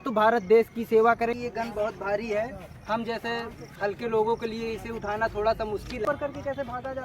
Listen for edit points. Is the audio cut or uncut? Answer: cut